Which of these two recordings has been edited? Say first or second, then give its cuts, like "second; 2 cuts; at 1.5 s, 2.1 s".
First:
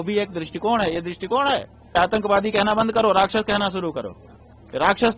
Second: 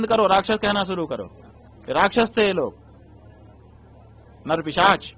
first; 1 cut; at 1.9 s